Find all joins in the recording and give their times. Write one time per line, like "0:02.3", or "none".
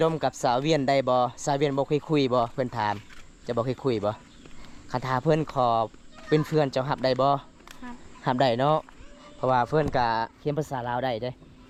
none

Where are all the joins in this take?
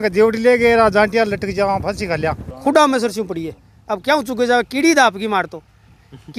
0:02.5

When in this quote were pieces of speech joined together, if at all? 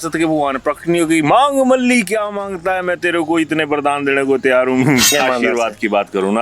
0:05.1

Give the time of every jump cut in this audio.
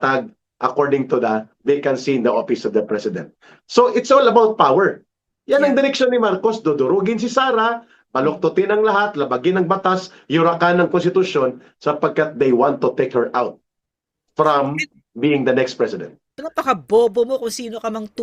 0:16.4

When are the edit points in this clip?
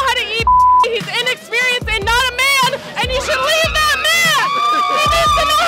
none

